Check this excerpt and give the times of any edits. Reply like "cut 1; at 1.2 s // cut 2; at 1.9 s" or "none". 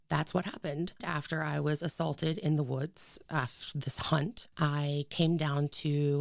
cut 1; at 1.0 s // cut 2; at 4.4 s